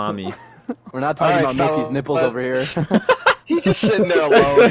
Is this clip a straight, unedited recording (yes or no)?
no